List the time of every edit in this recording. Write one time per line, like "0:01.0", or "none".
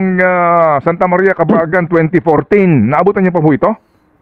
none